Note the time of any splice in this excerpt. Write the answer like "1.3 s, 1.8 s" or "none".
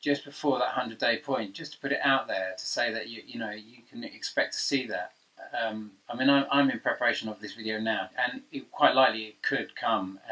none

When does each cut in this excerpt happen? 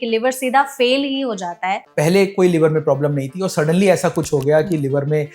1.8 s

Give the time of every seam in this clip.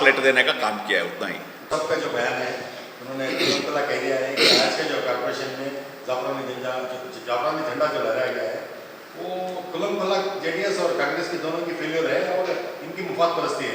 none

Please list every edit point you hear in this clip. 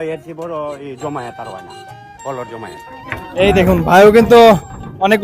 2.9 s

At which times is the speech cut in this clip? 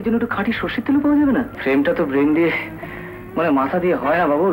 1.5 s

